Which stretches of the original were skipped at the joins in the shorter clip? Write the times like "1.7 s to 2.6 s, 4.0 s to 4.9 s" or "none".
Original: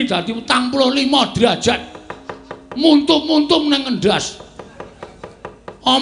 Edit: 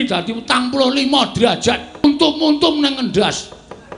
2.0 s to 2.9 s